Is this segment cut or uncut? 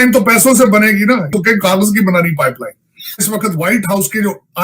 cut